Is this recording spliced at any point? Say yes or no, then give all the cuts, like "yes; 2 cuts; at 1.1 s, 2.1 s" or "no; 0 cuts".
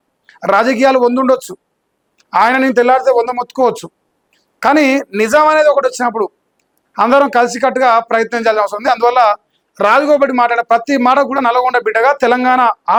no; 0 cuts